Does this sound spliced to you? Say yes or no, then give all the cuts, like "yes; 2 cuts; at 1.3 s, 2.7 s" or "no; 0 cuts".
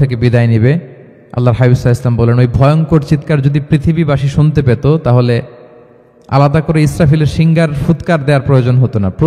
no; 0 cuts